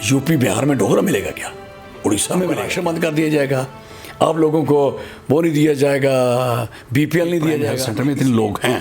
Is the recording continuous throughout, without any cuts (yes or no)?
no